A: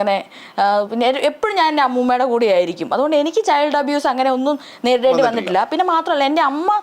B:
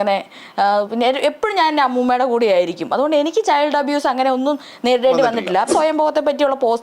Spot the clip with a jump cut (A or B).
B